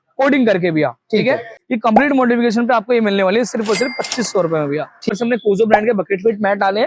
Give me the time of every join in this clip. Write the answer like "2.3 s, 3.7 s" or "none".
1.6 s, 5.1 s